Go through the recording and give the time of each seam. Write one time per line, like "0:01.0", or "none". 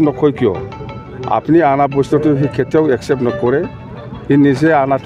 none